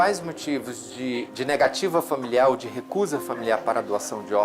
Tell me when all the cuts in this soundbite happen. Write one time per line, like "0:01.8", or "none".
0:01.3